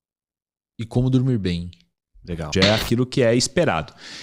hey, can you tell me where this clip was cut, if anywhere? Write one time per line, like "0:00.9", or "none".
0:02.5